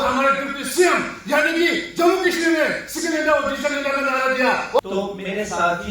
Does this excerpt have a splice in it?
yes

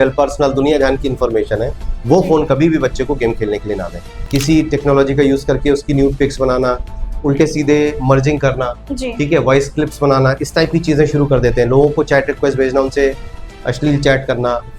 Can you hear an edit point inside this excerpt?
yes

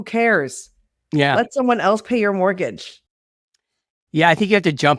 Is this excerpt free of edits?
yes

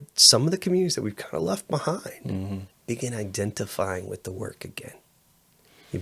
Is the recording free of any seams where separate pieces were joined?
yes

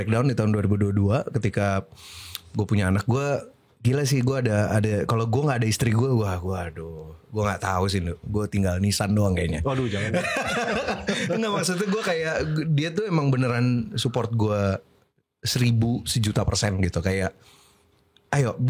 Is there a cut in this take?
no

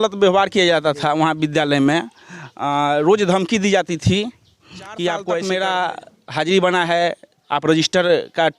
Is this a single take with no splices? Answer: no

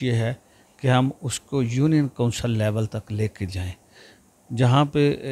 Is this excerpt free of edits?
yes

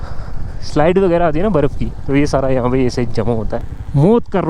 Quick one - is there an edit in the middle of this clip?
yes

